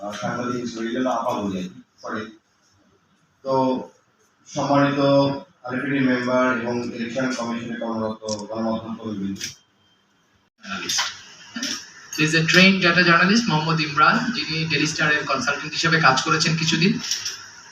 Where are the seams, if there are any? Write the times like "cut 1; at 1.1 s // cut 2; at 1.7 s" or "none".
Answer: cut 1; at 10.6 s